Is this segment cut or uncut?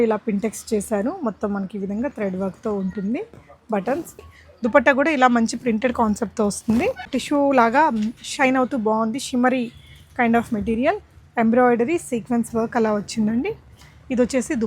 cut